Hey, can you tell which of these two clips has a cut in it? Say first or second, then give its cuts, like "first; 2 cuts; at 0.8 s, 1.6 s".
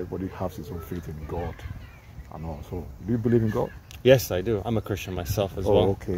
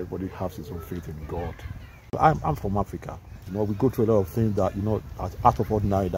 second; 2 cuts; at 2.1 s, 3.5 s